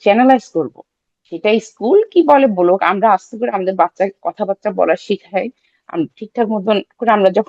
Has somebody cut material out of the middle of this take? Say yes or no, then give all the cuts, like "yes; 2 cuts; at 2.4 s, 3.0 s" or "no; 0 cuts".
no; 0 cuts